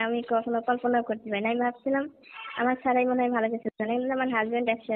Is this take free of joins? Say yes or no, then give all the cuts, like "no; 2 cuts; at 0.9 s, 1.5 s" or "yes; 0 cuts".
yes; 0 cuts